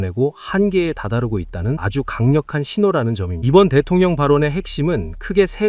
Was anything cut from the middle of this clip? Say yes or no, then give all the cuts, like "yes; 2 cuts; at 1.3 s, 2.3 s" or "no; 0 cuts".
yes; 2 cuts; at 1.8 s, 3.3 s